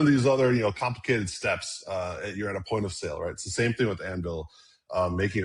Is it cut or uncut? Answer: uncut